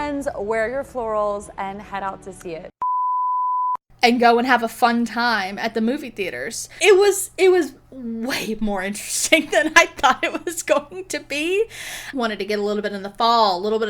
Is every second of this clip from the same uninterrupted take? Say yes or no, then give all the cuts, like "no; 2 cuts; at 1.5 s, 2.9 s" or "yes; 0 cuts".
no; 2 cuts; at 6.7 s, 12.1 s